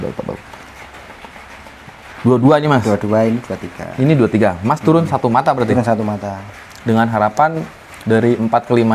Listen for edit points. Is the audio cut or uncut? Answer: uncut